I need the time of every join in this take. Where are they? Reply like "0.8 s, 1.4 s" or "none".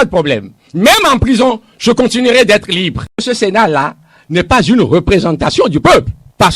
3.2 s